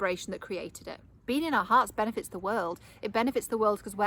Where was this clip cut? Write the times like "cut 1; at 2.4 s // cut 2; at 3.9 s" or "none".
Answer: cut 1; at 1.2 s